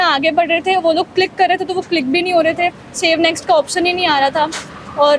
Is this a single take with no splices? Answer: yes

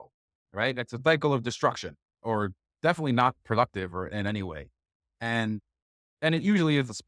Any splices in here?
yes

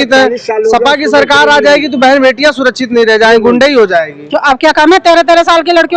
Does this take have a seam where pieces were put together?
no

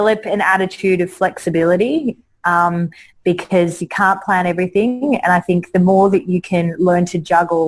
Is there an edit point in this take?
no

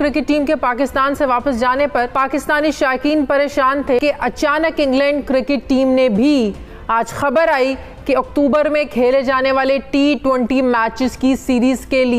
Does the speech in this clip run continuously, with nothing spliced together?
no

